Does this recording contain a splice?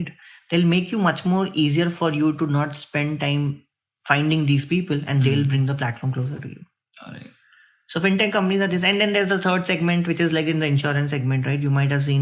no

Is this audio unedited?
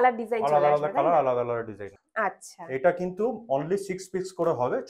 no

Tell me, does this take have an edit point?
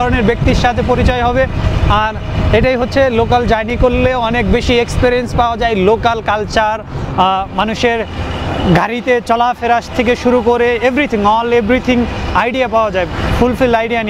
no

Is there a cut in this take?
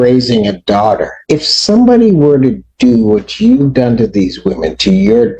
yes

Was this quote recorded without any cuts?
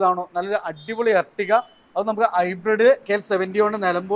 yes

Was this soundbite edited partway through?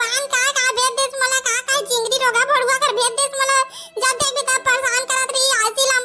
no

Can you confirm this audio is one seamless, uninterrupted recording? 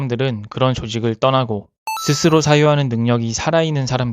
no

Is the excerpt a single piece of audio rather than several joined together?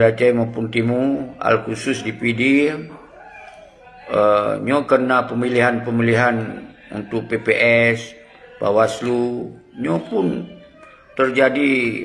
yes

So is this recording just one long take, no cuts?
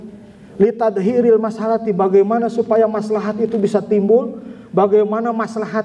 yes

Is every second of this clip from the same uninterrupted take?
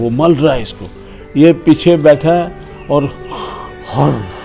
yes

